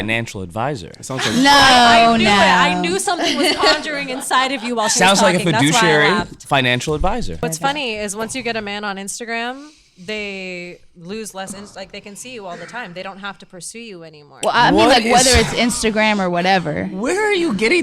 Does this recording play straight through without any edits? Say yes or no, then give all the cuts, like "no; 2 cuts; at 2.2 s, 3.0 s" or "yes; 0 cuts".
no; 1 cut; at 7.5 s